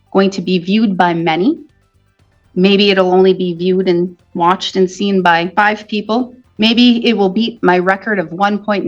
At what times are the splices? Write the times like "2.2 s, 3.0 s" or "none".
5.5 s, 6.4 s

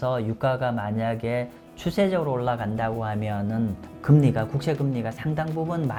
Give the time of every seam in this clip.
none

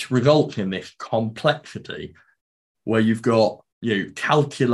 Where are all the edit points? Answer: 2.4 s, 3.7 s

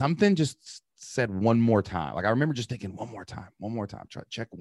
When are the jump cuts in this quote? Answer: none

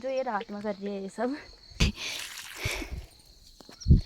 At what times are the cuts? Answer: 1.8 s

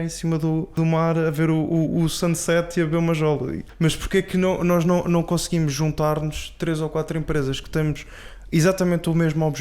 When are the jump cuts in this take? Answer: 0.8 s, 3.6 s

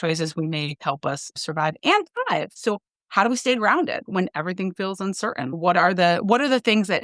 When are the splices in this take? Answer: 1.3 s, 2.5 s, 4.0 s, 5.6 s

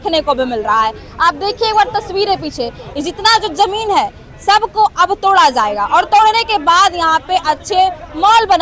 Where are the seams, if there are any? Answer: none

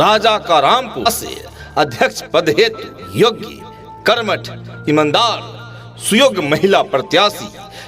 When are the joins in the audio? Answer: 1.0 s

